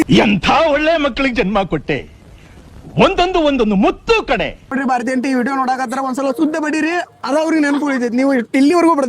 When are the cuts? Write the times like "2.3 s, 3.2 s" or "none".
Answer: 4.7 s